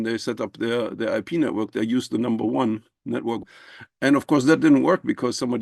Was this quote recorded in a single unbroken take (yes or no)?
no